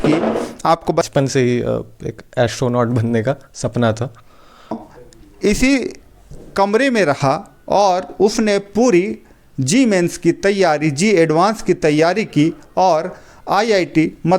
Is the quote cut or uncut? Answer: cut